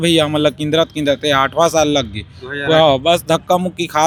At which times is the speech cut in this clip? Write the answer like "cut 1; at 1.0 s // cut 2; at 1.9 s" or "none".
none